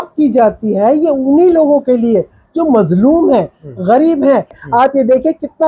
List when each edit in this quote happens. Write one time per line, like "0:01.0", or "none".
0:04.6